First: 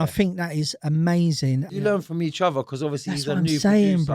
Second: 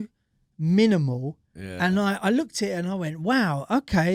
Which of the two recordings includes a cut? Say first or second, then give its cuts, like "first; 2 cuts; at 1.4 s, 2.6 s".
first; 1 cut; at 1.7 s